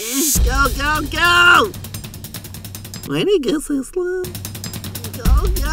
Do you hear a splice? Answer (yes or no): yes